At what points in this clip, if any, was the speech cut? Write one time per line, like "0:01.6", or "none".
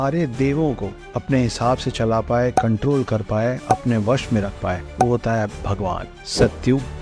0:06.1